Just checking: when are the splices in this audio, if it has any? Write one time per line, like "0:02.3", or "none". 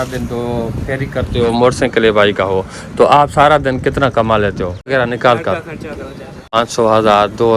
0:04.9
0:06.6